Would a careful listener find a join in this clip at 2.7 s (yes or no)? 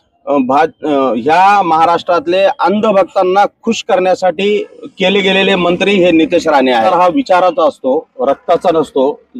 no